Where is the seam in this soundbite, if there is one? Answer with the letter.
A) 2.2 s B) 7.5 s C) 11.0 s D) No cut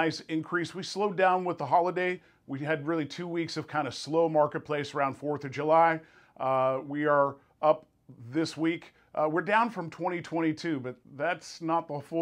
C